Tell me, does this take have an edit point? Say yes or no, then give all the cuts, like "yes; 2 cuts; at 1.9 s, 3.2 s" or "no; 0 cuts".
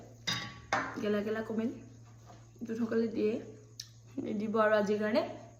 no; 0 cuts